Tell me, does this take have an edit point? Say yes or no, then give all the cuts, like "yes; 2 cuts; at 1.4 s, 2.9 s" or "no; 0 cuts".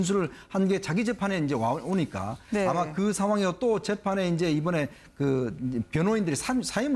yes; 1 cut; at 0.9 s